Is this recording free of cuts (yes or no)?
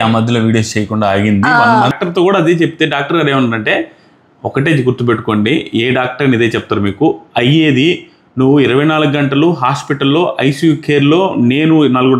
no